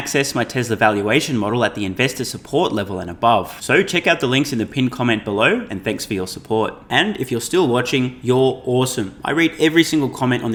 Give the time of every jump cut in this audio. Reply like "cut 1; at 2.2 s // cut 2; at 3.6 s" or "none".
none